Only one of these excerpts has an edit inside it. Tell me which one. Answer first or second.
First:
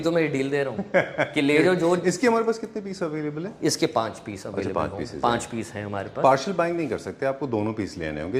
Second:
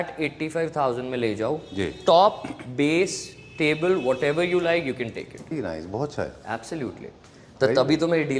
second